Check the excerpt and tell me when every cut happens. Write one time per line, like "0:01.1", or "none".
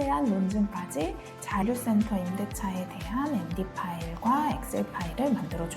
0:01.6

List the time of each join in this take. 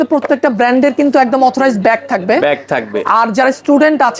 none

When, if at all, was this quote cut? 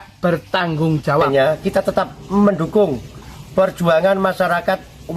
0:01.3

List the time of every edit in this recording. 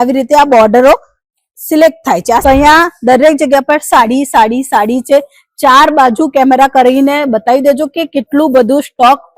0:02.4

